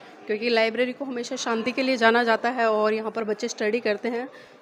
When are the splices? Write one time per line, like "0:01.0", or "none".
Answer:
none